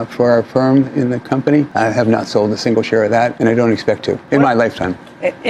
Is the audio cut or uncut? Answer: cut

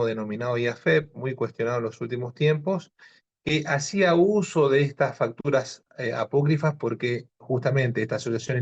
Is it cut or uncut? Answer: uncut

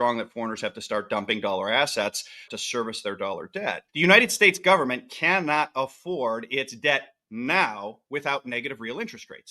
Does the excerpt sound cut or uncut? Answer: cut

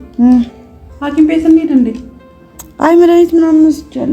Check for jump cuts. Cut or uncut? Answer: uncut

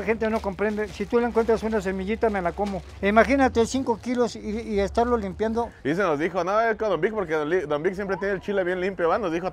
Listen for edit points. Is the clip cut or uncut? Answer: cut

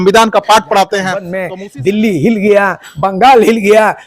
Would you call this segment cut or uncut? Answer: cut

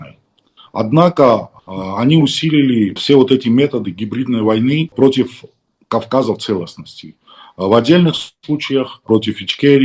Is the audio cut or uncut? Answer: cut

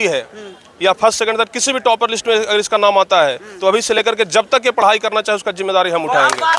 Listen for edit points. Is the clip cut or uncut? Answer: uncut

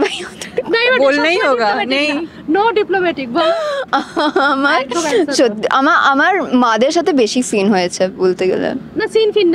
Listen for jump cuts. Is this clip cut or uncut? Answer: uncut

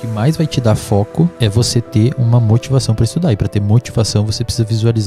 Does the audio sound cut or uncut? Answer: cut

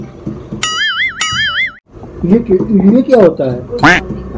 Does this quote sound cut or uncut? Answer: cut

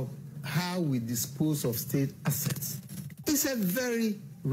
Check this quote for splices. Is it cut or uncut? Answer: uncut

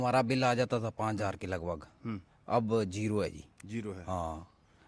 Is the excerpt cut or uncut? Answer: uncut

